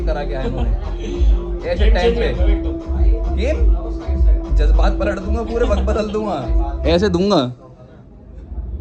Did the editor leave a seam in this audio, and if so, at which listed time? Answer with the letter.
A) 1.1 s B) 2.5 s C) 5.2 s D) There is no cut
D